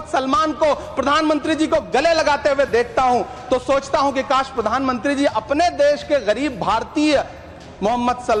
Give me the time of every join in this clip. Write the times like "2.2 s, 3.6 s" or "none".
none